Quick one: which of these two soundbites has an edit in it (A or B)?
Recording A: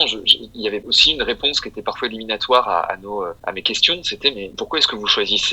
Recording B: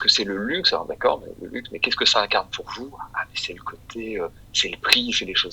A